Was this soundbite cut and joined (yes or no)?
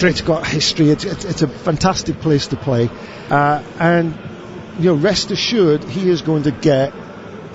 yes